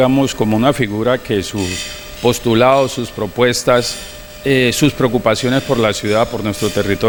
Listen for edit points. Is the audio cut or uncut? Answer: uncut